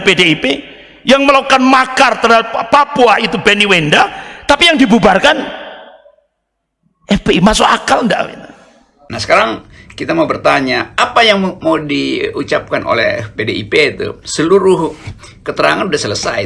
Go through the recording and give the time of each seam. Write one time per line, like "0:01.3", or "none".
0:09.1